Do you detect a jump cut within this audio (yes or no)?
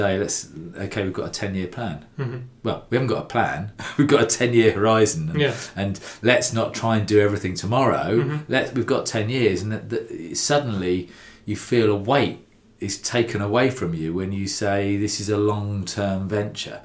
no